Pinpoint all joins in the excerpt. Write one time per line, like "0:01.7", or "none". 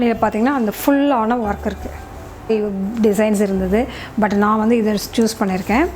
0:02.5